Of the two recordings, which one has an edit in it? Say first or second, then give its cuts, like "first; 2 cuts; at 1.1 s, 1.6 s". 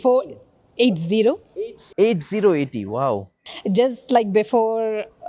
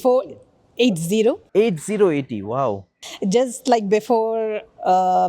second; 1 cut; at 1.4 s